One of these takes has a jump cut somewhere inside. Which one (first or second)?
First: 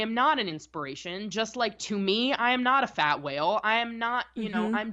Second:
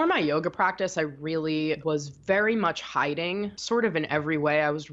second